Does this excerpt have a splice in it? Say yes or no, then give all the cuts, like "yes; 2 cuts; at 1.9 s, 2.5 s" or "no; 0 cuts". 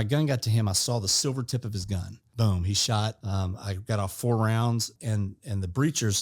yes; 3 cuts; at 2.2 s, 3.2 s, 4.9 s